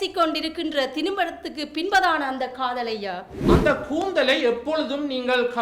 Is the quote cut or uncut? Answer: cut